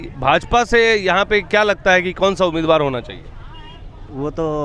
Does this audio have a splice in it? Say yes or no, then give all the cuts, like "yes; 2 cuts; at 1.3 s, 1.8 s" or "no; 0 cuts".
no; 0 cuts